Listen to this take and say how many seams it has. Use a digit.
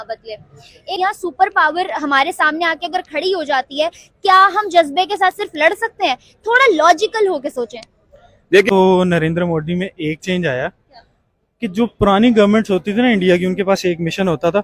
2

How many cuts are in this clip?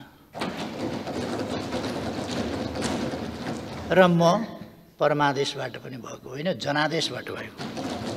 0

